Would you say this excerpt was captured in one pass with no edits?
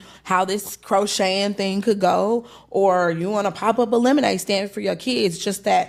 yes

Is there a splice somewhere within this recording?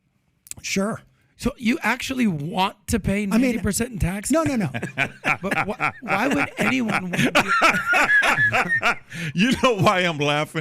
yes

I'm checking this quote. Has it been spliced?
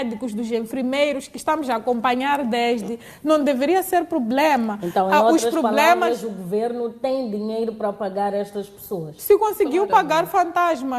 no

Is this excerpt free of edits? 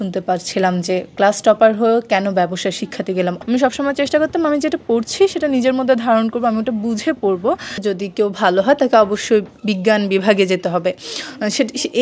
no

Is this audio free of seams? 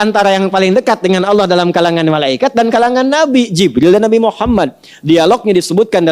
yes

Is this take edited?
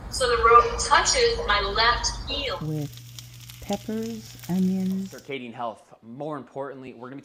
no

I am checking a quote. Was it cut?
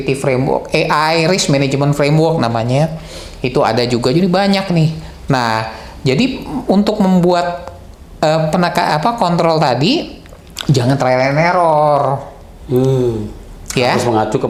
no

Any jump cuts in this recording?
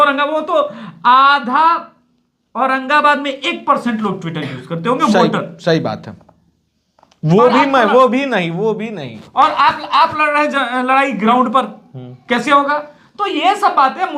no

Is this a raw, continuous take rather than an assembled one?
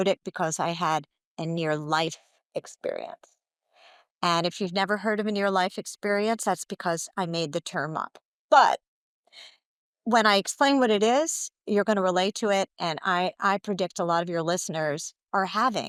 yes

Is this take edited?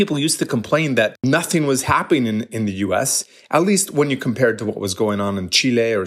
yes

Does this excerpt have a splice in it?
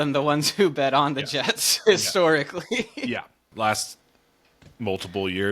yes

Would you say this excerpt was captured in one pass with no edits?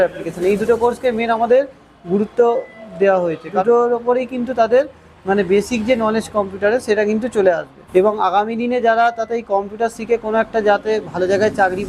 no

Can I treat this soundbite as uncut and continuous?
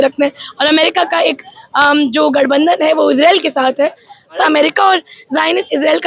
no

